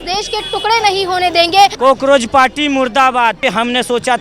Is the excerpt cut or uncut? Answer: cut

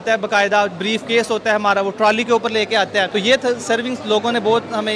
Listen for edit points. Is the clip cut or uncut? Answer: uncut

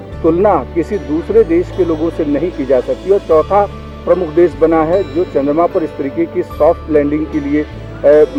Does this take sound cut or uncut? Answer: uncut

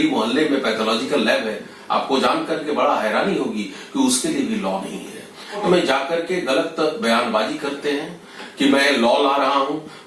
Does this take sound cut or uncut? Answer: cut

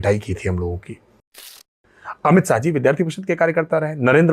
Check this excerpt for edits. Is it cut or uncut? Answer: cut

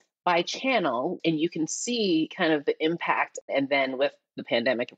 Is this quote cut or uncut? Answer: cut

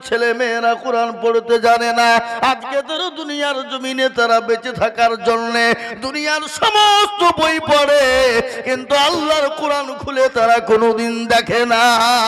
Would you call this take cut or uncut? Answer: uncut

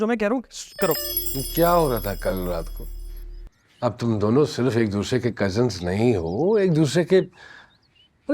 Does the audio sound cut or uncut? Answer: cut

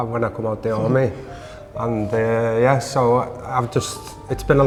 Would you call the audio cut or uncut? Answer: uncut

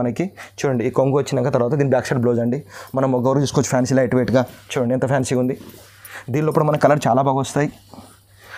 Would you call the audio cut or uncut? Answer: uncut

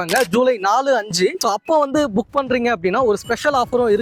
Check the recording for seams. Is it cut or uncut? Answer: uncut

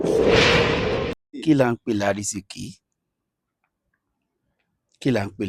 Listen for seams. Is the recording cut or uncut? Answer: uncut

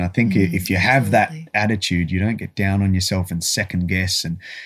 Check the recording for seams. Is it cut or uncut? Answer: uncut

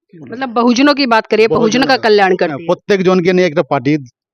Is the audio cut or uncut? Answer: uncut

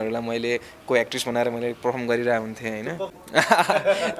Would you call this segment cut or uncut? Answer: cut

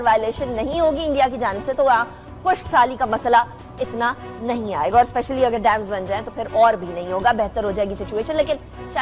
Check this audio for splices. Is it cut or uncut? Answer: uncut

